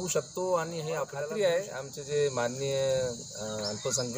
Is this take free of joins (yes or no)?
no